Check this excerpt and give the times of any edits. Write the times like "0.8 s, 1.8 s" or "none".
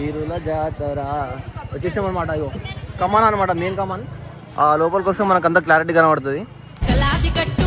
none